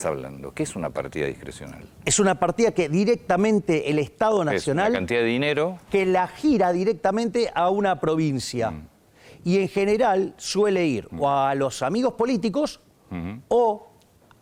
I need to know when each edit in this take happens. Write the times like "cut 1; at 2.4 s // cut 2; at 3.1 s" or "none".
none